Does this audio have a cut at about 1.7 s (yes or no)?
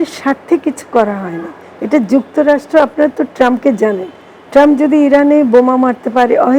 no